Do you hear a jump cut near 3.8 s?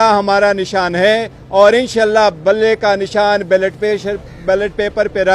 no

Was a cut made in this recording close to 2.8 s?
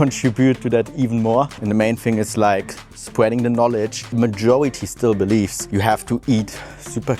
no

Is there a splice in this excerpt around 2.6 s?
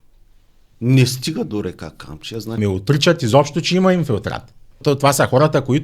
yes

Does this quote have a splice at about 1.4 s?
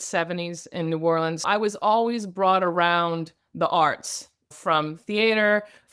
yes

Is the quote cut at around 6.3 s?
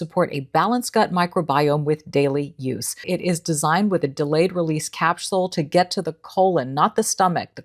no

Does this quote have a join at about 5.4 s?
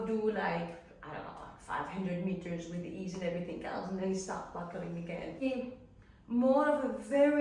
yes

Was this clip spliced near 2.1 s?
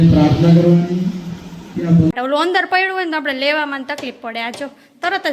yes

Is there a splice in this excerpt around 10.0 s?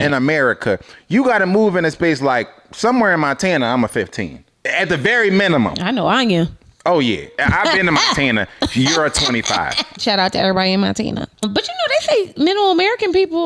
yes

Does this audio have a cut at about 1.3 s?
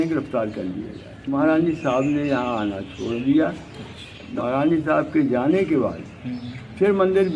yes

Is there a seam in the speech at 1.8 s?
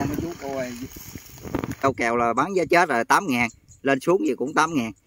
yes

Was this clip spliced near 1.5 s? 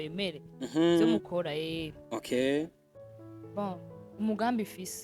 no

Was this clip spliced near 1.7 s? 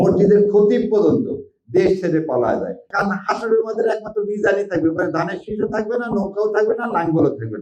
no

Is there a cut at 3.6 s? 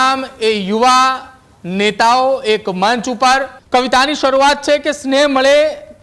yes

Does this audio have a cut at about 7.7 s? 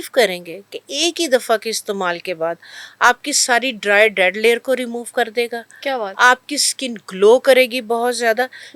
no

